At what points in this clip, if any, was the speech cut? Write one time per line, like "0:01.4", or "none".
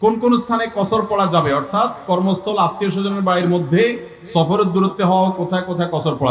none